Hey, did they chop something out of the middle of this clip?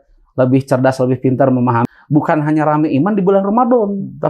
yes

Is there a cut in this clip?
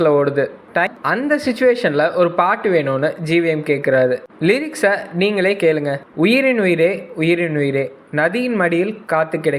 yes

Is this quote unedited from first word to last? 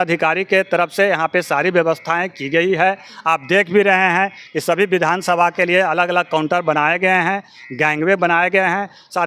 yes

